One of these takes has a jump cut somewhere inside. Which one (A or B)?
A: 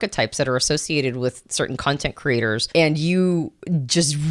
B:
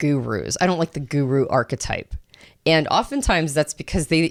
A